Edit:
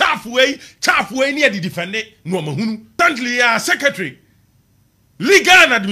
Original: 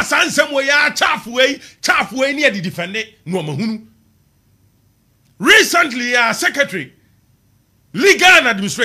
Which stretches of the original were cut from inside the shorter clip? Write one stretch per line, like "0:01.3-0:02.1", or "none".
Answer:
0:04.0-0:05.7